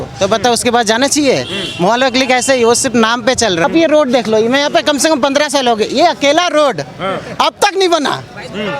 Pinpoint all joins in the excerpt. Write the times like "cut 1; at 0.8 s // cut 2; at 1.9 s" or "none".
cut 1; at 3.6 s